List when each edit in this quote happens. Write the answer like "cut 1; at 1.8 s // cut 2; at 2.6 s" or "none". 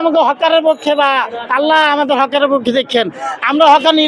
none